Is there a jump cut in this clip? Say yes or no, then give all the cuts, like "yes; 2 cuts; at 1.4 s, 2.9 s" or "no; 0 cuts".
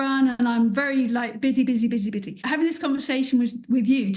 yes; 1 cut; at 2.3 s